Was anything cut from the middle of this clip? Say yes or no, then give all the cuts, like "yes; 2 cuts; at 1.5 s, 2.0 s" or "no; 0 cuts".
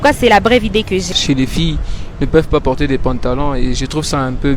yes; 1 cut; at 1.1 s